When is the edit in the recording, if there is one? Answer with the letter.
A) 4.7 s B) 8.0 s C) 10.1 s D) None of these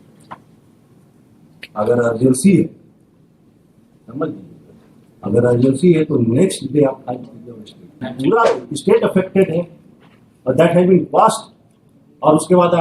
B